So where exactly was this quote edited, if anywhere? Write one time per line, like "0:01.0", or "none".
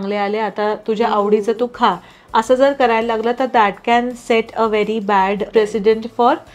0:05.5